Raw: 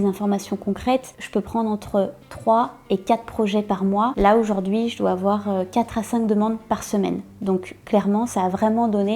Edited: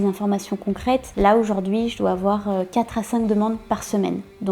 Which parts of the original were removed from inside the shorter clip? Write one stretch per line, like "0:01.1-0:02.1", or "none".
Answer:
0:01.1-0:04.1